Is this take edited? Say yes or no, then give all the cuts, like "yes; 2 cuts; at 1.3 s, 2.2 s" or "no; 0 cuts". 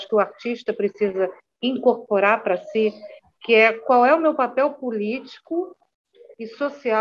no; 0 cuts